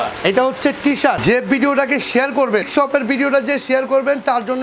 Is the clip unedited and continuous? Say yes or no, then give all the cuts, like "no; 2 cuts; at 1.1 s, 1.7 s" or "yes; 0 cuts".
no; 2 cuts; at 1.2 s, 2.7 s